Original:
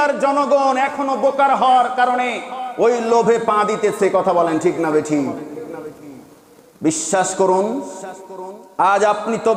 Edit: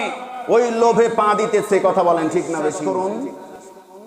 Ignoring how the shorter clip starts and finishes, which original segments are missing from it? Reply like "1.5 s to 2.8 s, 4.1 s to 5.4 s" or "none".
5.1 s to 7.3 s